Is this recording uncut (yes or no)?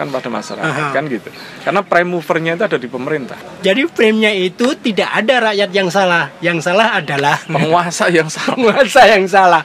no